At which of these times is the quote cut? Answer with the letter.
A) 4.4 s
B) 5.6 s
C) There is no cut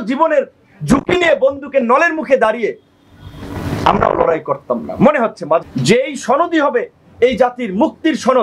B